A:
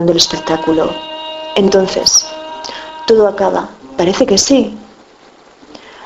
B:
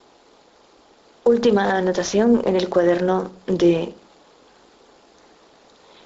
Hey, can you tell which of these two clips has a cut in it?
B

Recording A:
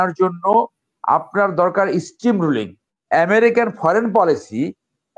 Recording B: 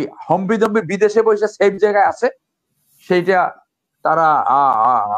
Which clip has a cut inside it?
A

